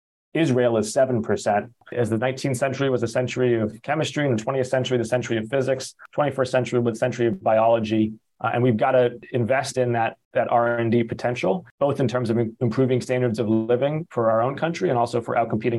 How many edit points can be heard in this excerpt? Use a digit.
6